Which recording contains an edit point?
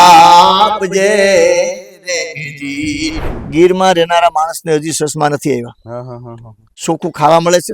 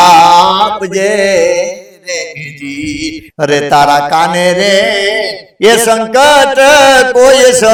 first; 1 cut; at 3.2 s

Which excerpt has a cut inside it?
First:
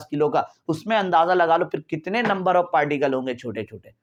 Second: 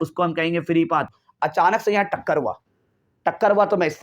second; 1 cut; at 1.2 s

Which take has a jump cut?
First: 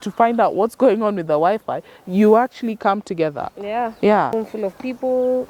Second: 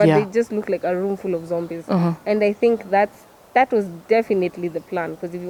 first; 1 cut; at 4.3 s

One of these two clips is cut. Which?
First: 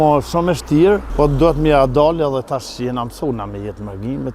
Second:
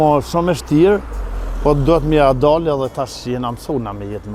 first; 1 cut; at 1.1 s

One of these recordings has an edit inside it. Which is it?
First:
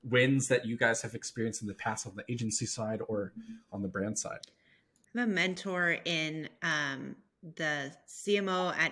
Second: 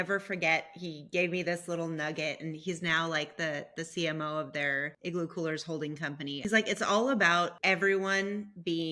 second; 3 cuts; at 4.9 s, 6.4 s, 7.6 s

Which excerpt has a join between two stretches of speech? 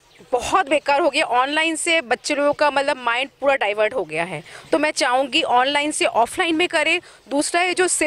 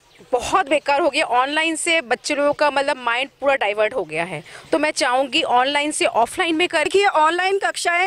second; 1 cut; at 6.9 s

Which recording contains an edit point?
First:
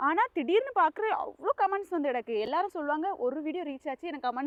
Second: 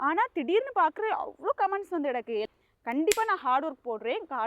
second; 1 cut; at 2.5 s

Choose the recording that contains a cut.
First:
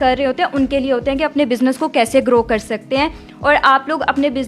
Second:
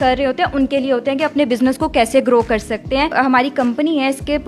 second; 1 cut; at 3.1 s

